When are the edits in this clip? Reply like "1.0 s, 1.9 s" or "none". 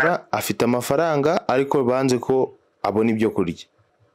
2.7 s